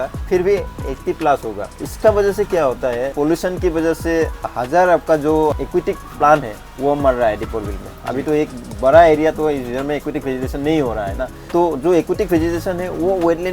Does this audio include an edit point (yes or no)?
yes